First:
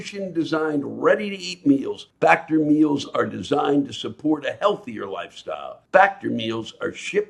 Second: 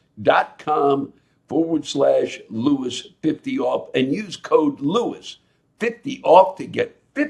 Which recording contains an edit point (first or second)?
first